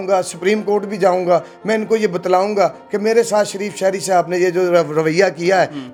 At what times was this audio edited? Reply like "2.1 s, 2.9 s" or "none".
none